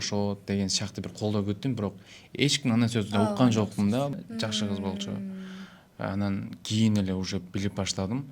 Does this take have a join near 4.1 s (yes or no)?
yes